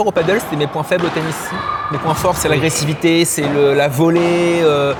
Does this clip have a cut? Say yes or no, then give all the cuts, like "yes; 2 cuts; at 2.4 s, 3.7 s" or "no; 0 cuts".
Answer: no; 0 cuts